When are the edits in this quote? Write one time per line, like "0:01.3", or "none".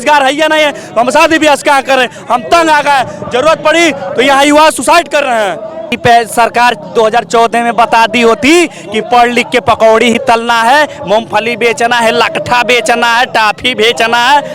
0:06.0